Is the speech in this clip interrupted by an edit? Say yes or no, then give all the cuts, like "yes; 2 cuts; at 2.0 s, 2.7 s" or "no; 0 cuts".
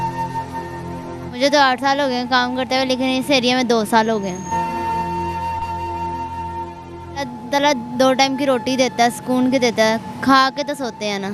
yes; 2 cuts; at 1.2 s, 7.3 s